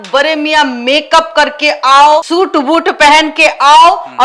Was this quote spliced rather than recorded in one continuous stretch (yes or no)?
yes